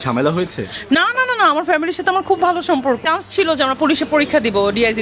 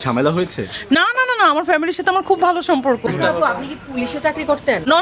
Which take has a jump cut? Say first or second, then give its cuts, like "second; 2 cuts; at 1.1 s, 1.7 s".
first; 1 cut; at 3.0 s